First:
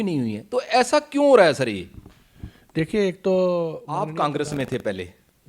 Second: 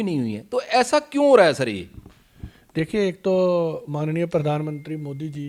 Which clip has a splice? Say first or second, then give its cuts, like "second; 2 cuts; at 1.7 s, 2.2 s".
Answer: first; 1 cut; at 3.9 s